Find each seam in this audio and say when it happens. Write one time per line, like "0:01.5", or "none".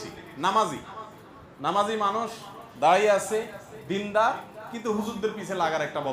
none